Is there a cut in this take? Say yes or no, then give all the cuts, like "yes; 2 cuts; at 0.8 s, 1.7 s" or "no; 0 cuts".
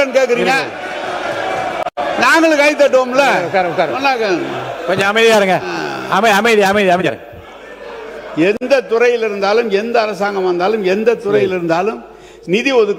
no; 0 cuts